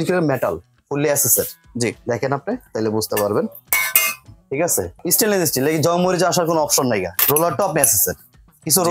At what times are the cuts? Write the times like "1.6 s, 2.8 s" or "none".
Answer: 5.0 s, 7.2 s